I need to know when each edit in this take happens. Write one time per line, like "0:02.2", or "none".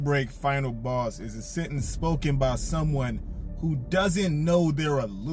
none